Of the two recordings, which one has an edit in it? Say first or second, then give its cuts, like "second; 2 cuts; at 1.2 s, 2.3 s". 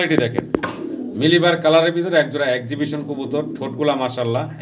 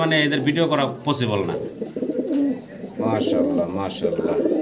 second; 1 cut; at 1.7 s